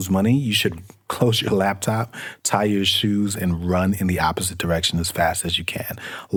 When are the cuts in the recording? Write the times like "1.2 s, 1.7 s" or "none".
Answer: none